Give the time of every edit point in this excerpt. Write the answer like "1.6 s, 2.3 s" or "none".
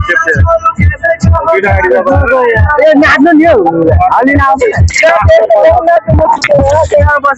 none